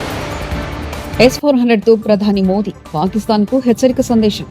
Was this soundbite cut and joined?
yes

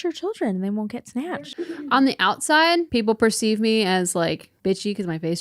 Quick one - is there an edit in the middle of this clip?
yes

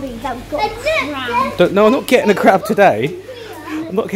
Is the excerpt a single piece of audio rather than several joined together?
yes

